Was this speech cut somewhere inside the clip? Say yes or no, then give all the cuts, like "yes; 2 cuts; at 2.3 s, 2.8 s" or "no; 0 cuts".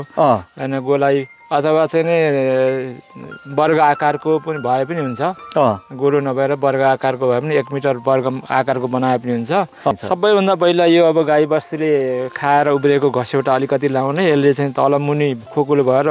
yes; 1 cut; at 9.9 s